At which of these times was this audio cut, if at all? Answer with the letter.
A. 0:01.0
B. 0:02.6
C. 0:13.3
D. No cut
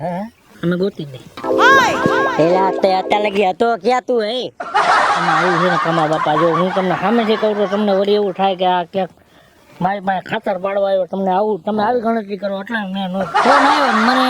C